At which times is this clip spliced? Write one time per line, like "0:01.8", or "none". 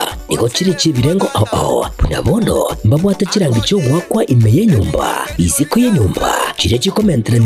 0:05.9